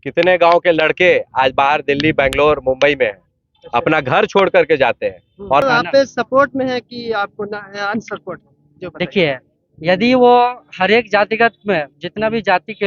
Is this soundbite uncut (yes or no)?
no